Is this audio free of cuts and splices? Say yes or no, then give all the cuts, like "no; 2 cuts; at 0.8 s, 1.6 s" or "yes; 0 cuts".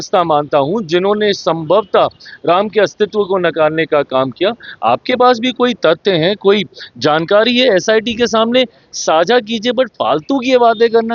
yes; 0 cuts